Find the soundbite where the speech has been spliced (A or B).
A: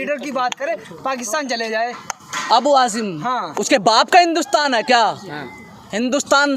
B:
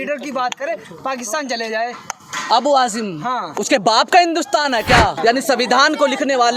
B